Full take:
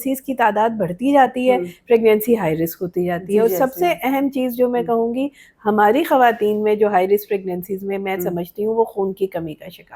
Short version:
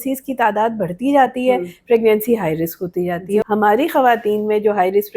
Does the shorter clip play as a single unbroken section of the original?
no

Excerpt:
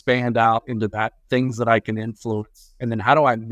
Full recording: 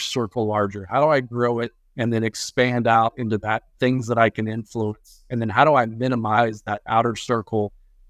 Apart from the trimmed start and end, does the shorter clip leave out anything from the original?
no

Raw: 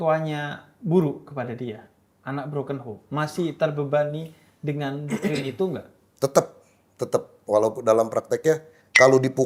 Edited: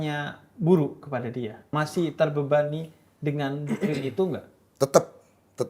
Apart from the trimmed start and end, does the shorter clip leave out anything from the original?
yes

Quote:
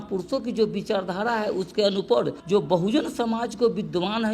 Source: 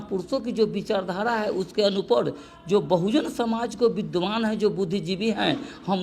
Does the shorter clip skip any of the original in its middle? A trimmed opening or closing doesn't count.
yes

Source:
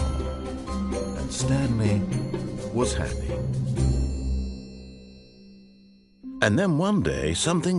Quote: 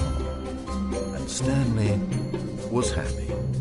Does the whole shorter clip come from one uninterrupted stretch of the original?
yes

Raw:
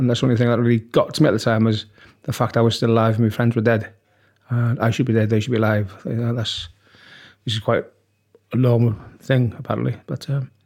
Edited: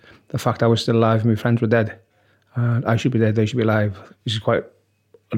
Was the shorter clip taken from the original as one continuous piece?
no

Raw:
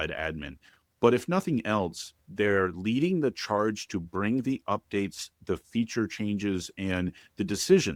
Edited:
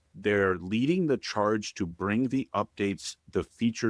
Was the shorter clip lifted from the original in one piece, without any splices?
yes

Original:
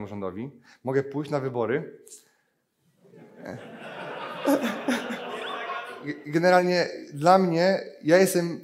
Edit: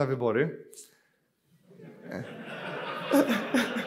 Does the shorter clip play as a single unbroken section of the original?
yes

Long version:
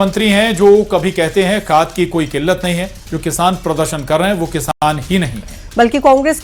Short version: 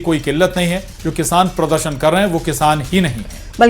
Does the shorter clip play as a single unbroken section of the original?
no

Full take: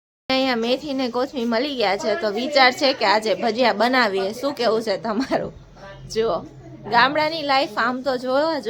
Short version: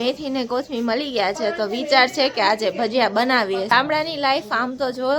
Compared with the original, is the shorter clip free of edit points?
no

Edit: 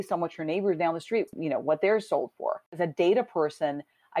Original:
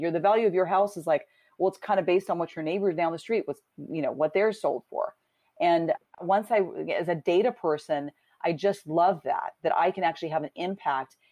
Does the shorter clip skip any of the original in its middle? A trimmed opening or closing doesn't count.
yes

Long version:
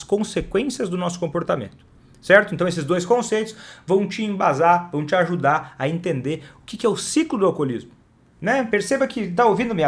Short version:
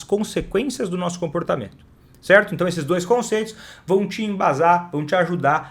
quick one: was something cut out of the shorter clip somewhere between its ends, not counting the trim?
no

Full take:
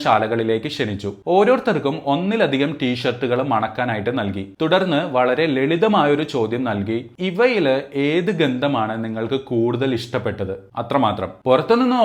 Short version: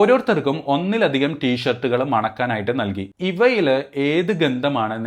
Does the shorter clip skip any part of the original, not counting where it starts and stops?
yes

